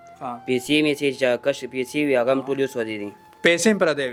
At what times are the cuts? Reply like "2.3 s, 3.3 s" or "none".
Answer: none